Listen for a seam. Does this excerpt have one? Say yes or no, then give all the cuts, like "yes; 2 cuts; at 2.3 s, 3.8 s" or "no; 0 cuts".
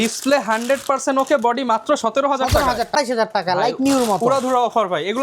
yes; 1 cut; at 2.9 s